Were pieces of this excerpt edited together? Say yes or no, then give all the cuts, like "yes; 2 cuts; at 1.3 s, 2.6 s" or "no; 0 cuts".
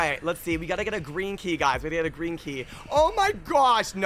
no; 0 cuts